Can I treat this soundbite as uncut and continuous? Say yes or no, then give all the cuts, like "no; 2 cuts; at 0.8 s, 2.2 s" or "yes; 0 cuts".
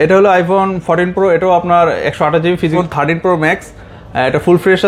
no; 1 cut; at 2.7 s